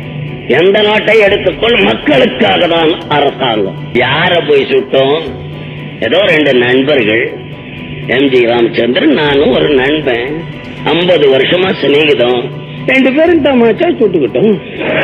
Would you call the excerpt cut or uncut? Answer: cut